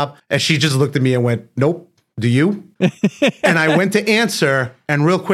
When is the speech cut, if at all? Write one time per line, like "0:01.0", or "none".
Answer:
0:02.7